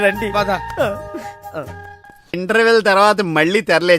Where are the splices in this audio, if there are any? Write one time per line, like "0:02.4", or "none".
0:02.3